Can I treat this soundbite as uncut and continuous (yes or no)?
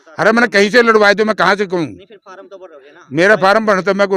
yes